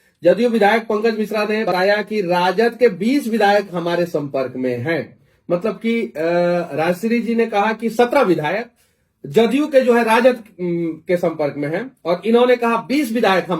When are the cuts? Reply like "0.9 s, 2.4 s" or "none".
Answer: 1.7 s